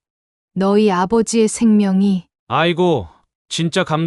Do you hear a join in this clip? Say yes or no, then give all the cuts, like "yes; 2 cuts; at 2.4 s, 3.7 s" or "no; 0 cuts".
no; 0 cuts